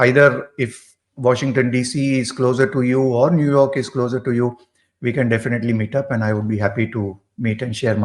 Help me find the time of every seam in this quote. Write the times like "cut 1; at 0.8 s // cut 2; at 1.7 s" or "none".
none